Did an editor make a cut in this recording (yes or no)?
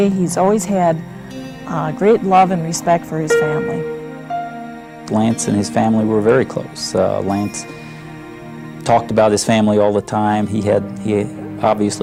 no